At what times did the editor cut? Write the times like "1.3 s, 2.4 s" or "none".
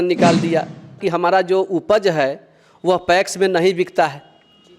1.0 s